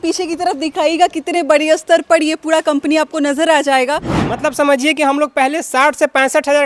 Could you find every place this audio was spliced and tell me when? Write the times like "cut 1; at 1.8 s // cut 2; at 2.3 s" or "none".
cut 1; at 4.3 s